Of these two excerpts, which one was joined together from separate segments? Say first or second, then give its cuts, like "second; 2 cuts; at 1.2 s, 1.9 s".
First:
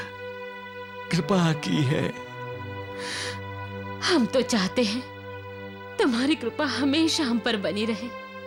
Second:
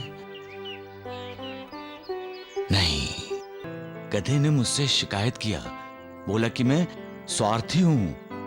second; 1 cut; at 3.7 s